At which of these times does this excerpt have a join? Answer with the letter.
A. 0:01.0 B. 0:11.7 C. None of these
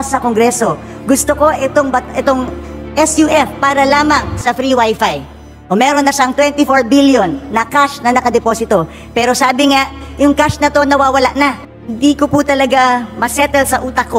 B